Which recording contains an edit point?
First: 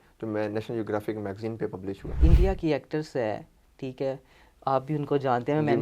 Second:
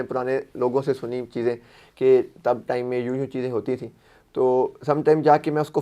first; 1 cut; at 2.2 s

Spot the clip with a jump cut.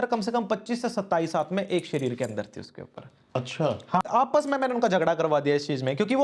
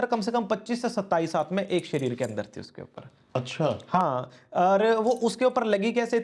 first; 1 cut; at 4.0 s

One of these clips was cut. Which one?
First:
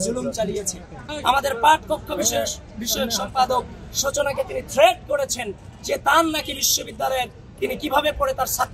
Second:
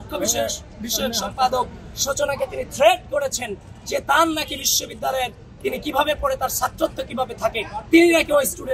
first; 1 cut; at 1.1 s

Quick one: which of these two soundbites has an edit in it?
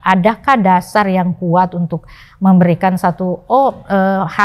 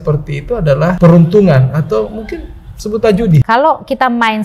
second; 2 cuts; at 1.0 s, 3.4 s

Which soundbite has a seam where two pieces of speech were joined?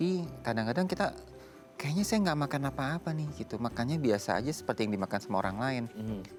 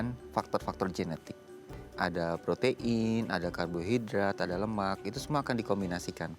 second; 1 cut; at 1.8 s

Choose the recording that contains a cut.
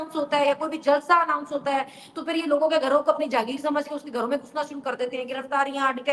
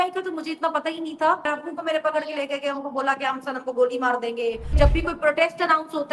second; 2 cuts; at 1.5 s, 4.7 s

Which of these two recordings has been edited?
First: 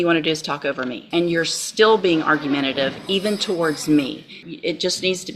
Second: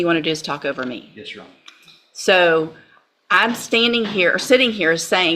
first; 2 cuts; at 1.0 s, 4.4 s

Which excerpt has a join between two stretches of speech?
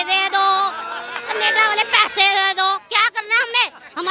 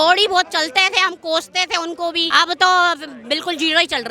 second; 1 cut; at 2.3 s

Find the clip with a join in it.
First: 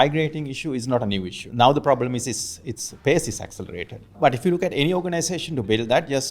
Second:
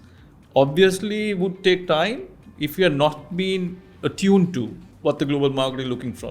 first; 2 cuts; at 1.4 s, 4.1 s

